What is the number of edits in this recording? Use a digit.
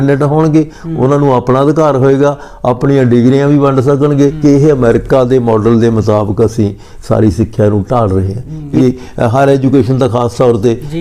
2